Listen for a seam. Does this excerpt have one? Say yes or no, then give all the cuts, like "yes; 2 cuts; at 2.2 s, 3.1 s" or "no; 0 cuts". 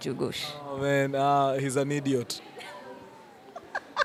no; 0 cuts